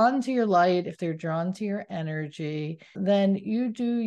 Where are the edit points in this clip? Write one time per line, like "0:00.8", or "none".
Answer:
0:03.0